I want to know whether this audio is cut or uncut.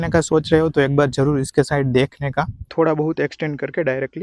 cut